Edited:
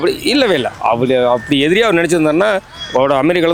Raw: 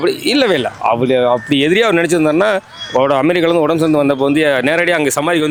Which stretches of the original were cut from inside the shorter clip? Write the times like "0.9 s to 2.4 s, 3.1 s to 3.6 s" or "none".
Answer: none

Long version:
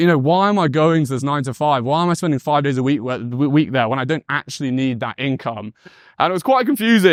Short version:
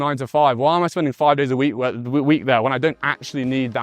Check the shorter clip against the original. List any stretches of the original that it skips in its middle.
none

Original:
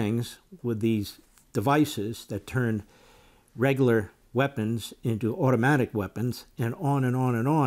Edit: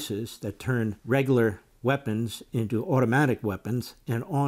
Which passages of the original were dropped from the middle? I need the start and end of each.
2.9 s to 3.5 s

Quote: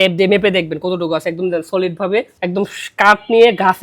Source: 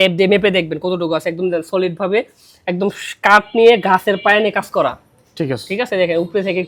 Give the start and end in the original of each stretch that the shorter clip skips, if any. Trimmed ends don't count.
2.3 s to 2.6 s

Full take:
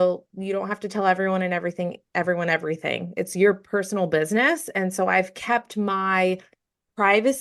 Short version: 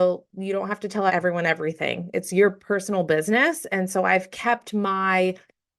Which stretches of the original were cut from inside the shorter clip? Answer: 1.1 s to 2.1 s

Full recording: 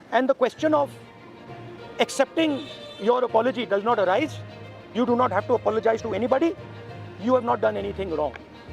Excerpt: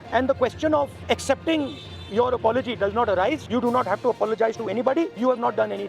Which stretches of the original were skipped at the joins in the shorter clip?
1.0 s to 1.9 s, 4.3 s to 4.9 s, 6.6 s to 7.2 s

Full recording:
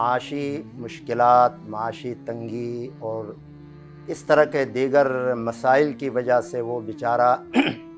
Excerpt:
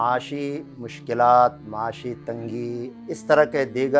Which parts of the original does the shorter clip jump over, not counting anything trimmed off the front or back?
2.9 s to 3.9 s

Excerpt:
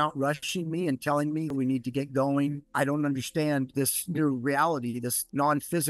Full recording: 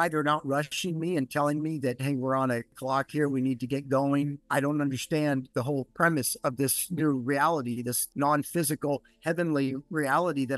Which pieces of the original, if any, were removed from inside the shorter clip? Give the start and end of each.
1.8 s to 3.3 s, 5.5 s to 6.5 s

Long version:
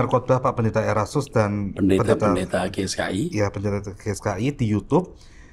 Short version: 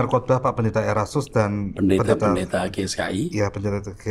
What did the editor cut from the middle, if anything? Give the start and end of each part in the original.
none

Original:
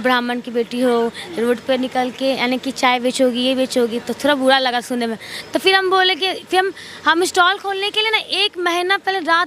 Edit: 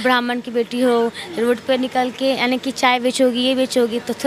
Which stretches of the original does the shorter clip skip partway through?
none

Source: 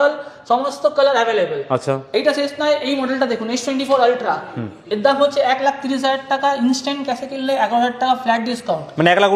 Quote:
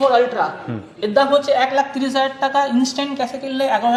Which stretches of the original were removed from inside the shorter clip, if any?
none

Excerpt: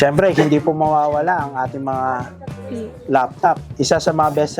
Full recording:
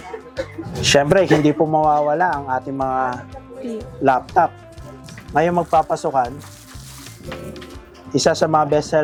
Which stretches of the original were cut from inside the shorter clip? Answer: 4.6 s to 8.0 s

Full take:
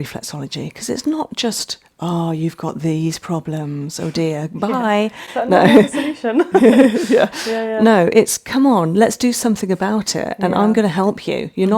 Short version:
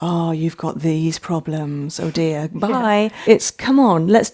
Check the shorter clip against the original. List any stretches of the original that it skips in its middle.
5.2 s to 8.1 s

